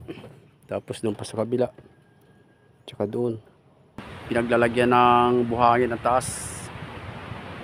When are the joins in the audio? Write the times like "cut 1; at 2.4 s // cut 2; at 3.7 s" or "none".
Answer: cut 1; at 4.1 s

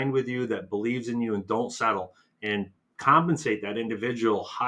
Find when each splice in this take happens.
none

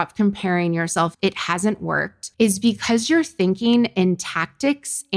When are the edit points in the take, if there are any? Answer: cut 1; at 1.1 s

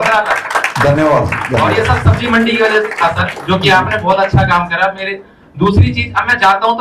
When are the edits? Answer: none

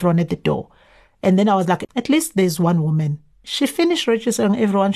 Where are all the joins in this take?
cut 1; at 1.9 s // cut 2; at 3.5 s

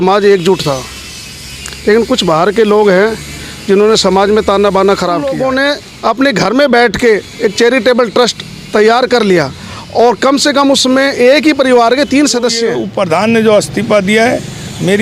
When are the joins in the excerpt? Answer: cut 1; at 5.4 s // cut 2; at 12.8 s

